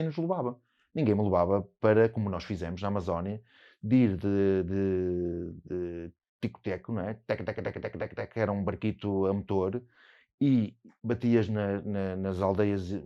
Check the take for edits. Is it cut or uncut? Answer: uncut